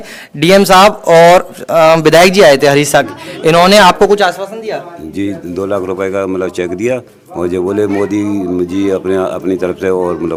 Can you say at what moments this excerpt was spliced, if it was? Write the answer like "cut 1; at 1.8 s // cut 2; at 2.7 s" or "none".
none